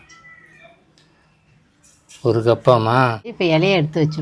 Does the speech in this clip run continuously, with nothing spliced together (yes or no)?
no